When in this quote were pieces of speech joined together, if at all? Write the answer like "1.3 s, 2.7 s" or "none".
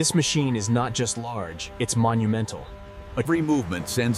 none